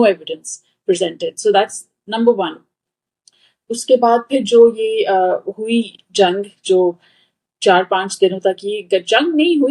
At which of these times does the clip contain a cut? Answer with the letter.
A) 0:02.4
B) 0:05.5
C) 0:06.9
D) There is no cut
D